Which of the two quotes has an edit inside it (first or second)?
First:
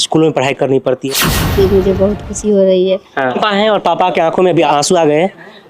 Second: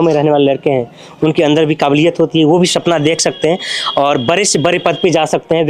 first